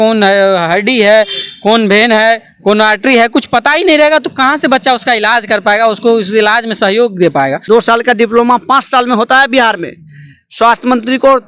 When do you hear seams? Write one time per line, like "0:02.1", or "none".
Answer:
0:07.6